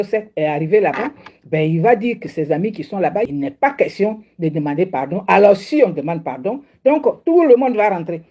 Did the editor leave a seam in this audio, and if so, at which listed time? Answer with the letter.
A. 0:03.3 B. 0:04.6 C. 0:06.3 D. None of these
A